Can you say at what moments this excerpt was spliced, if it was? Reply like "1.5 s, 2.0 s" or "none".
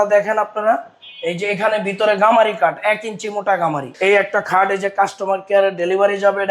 3.9 s